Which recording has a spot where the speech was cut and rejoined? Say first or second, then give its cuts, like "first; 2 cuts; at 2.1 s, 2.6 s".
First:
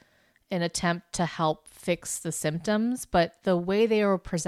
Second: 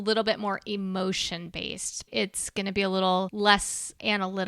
second; 2 cuts; at 2.1 s, 3.3 s